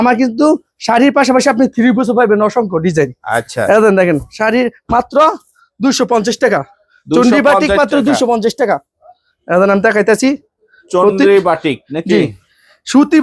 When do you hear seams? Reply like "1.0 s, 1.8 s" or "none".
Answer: none